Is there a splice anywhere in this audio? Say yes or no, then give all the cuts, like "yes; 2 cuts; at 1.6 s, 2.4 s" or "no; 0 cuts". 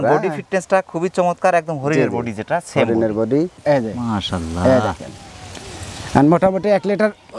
yes; 1 cut; at 3.5 s